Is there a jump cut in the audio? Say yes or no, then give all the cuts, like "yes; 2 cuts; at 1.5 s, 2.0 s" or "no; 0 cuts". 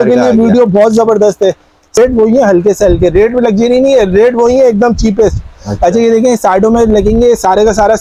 yes; 1 cut; at 2.0 s